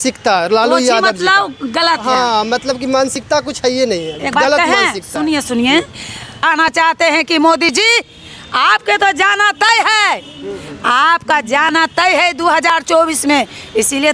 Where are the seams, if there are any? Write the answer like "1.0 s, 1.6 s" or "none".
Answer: 6.4 s